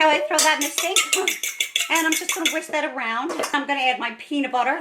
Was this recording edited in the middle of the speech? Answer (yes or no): yes